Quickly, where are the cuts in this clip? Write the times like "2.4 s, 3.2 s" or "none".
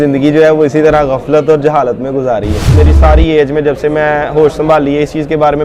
2.6 s